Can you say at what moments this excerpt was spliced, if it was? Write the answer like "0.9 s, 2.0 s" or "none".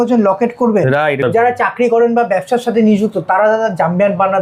1.2 s